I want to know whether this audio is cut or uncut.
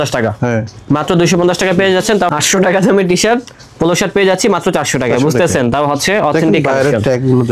cut